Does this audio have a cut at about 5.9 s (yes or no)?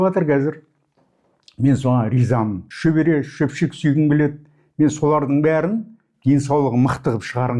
no